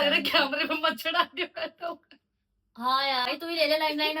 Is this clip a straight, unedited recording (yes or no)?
no